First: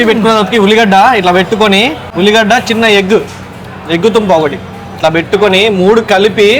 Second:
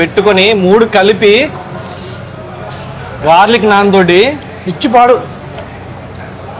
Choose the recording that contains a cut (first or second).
first